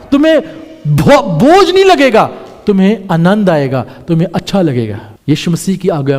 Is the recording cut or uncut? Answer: uncut